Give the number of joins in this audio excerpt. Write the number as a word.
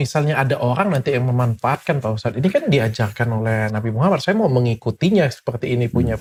zero